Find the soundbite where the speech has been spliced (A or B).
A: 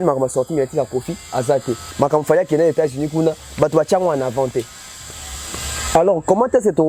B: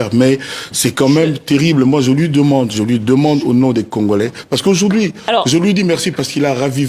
A